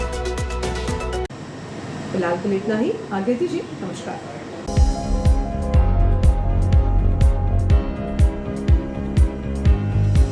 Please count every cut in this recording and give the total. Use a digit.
0